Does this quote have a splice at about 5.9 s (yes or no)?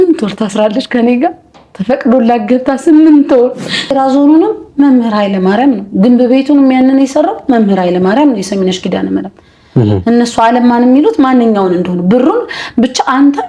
no